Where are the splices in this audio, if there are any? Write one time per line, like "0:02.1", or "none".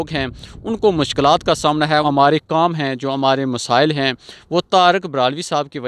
0:02.0